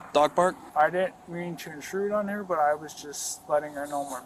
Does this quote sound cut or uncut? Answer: uncut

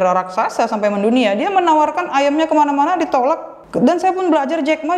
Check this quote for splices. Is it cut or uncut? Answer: cut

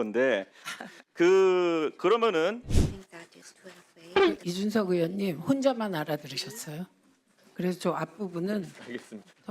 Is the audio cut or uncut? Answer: cut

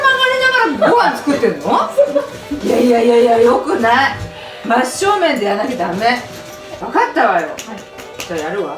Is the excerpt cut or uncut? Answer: cut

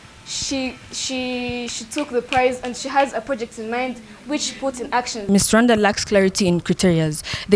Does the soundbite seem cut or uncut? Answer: cut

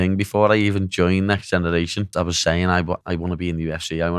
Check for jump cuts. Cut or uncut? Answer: cut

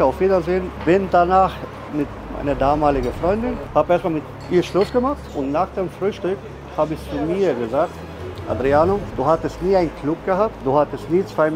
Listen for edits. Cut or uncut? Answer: cut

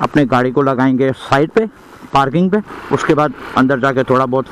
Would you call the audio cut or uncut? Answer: uncut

